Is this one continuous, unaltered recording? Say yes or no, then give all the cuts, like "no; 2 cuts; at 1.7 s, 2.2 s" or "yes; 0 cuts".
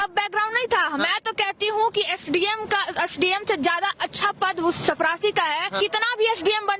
no; 1 cut; at 5.7 s